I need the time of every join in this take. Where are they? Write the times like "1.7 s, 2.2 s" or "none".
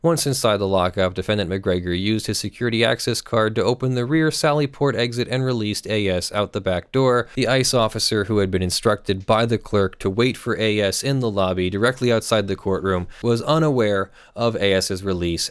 7.3 s, 13.1 s